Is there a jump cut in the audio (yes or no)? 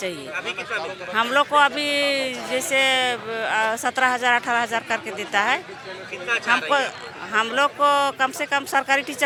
no